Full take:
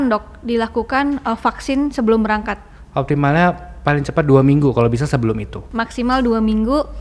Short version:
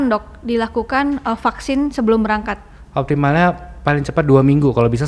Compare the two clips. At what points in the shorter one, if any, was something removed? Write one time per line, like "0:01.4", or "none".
none